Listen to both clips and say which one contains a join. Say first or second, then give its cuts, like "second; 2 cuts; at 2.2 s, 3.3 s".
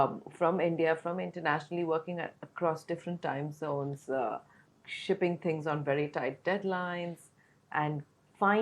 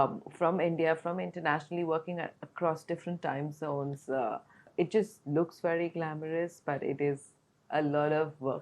second; 1 cut; at 4.6 s